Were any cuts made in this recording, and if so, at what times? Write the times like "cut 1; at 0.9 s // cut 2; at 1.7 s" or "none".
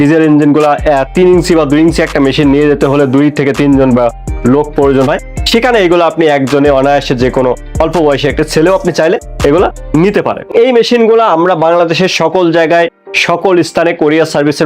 cut 1; at 10.5 s